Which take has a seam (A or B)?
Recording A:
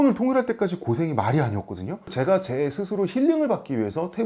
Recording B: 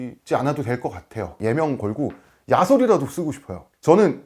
B